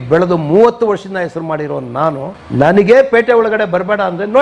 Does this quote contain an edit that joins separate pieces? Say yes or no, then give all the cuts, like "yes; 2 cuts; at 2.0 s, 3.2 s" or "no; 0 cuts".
no; 0 cuts